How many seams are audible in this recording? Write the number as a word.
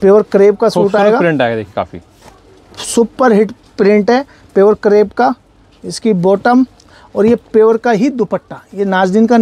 zero